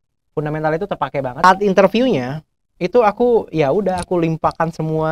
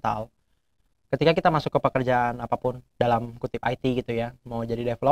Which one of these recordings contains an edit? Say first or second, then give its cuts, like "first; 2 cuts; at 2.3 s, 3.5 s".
first; 1 cut; at 1.4 s